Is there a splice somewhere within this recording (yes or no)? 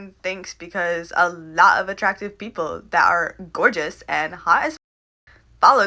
no